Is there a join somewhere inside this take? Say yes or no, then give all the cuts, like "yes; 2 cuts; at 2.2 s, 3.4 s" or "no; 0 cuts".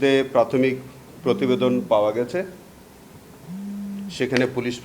no; 0 cuts